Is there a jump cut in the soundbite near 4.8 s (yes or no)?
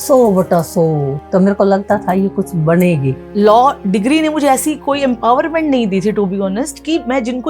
no